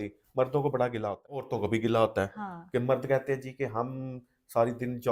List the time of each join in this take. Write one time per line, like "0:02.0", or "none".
0:01.5